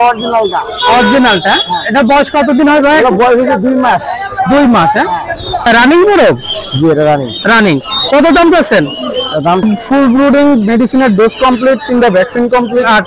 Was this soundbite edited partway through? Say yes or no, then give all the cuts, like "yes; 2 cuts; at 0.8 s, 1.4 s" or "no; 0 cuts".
yes; 2 cuts; at 5.7 s, 9.6 s